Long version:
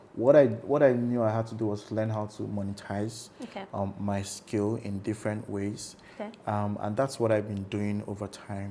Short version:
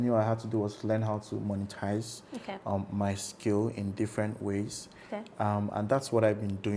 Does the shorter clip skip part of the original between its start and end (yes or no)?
no